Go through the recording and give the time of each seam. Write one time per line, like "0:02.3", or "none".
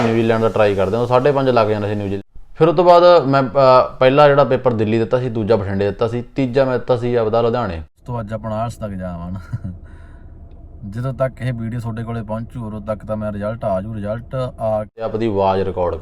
0:02.2
0:08.0
0:15.1